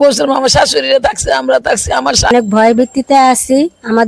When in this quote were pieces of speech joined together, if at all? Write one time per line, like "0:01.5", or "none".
0:02.3